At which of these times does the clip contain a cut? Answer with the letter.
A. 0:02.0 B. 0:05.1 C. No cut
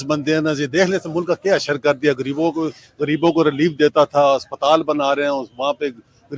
C